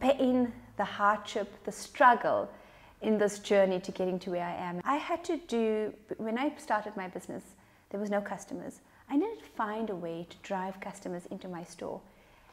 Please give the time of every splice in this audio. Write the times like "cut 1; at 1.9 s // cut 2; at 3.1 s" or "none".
cut 1; at 4.7 s